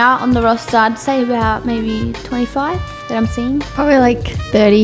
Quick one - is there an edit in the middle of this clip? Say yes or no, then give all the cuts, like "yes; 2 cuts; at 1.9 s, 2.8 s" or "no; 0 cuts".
yes; 1 cut; at 3.7 s